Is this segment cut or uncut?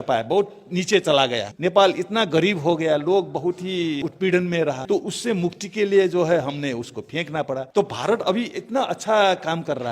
cut